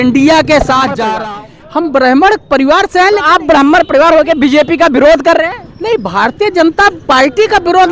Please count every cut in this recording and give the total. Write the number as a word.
one